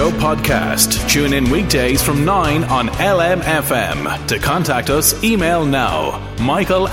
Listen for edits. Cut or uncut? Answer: uncut